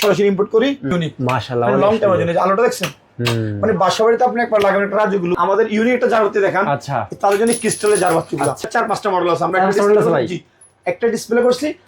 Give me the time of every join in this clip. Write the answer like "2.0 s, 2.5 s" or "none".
0.9 s, 5.4 s, 8.6 s